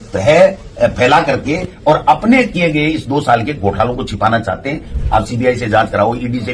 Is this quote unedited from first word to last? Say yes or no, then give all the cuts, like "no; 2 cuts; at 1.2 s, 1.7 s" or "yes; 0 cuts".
no; 1 cut; at 4.9 s